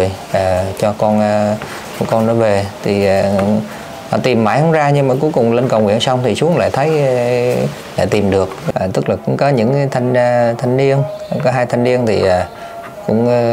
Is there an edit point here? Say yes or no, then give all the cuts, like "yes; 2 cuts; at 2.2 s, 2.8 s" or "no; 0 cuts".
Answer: yes; 1 cut; at 8.6 s